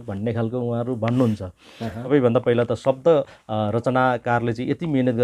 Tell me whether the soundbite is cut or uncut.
cut